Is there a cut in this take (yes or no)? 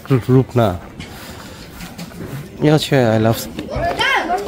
yes